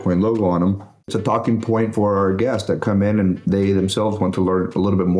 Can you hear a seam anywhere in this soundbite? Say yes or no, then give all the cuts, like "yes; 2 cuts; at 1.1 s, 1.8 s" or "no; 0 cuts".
yes; 1 cut; at 1.1 s